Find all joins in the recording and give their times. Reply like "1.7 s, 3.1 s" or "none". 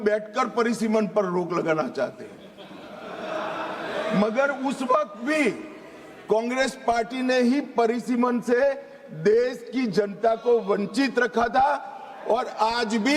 none